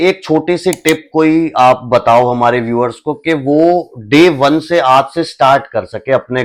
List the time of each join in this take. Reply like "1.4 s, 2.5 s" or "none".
none